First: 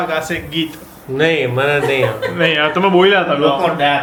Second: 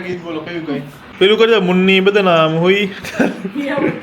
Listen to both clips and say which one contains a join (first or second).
second